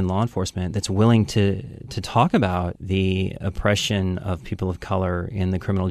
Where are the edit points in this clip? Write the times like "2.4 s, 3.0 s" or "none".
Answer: 2.8 s